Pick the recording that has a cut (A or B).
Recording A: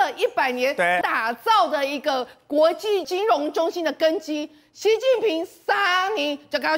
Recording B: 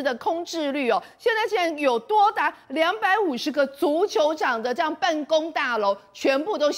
A